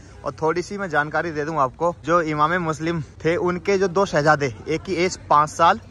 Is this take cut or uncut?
cut